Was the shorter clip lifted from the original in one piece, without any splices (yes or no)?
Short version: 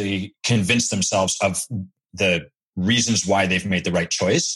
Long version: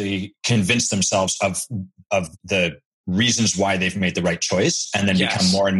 no